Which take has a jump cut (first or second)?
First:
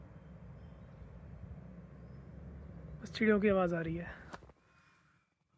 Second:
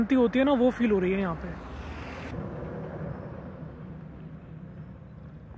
second